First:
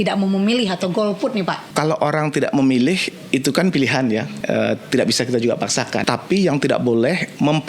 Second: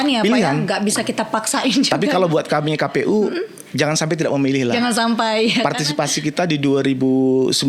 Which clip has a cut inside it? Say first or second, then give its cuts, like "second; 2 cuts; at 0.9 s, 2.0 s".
first; 3 cuts; at 1.6 s, 4.3 s, 6.0 s